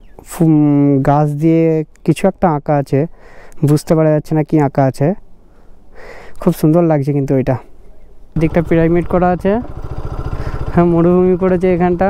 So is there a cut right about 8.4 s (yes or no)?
yes